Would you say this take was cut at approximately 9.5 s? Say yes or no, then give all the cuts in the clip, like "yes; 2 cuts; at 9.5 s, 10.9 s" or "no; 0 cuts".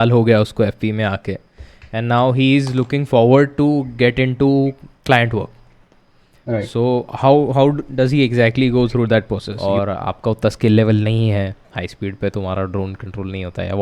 yes; 1 cut; at 9.5 s